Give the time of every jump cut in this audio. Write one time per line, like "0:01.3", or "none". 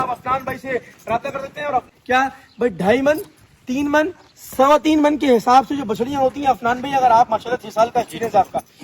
0:01.9